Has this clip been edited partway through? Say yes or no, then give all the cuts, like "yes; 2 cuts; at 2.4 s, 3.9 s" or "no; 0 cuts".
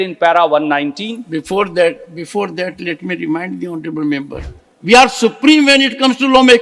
yes; 1 cut; at 4.4 s